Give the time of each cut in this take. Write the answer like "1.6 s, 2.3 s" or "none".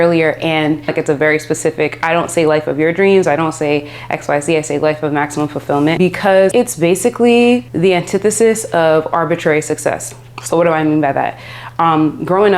0.9 s, 6.5 s, 7.7 s